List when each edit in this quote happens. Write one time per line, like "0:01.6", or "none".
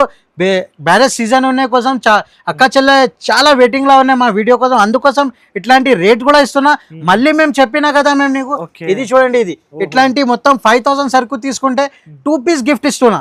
none